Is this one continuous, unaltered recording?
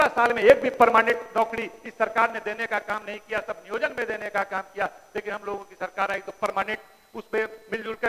yes; 0 cuts

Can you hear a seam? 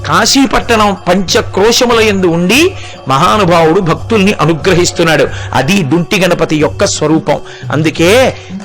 no; 0 cuts

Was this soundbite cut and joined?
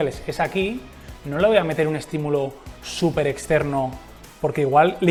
no; 0 cuts

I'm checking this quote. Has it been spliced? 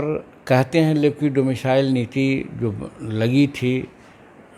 no; 0 cuts

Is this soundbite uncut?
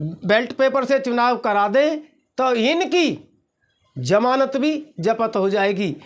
yes; 0 cuts

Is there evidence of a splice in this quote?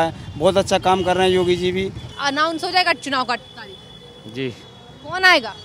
yes; 1 cut; at 2.1 s

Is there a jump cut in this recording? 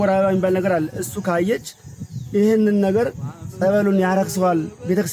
no; 0 cuts

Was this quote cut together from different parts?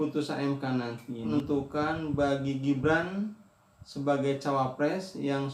yes; 1 cut; at 1.3 s

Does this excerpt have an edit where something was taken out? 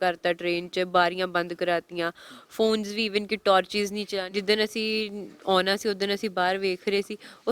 yes; 1 cut; at 4.2 s

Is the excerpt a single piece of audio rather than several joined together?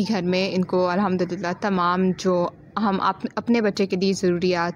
yes; 0 cuts

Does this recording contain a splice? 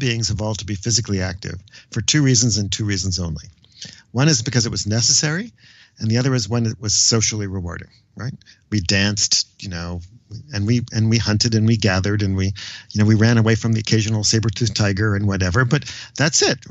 no; 0 cuts

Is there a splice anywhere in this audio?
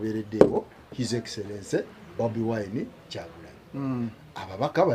no; 0 cuts

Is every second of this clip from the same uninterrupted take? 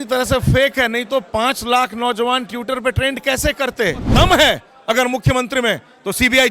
no; 1 cut; at 4.1 s

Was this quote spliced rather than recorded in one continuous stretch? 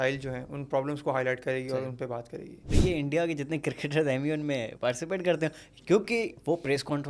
yes; 1 cut; at 2.7 s

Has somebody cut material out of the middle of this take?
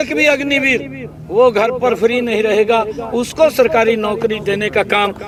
no; 0 cuts

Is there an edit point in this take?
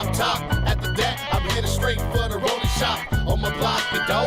no; 0 cuts

